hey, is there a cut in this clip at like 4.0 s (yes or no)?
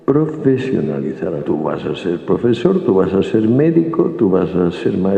no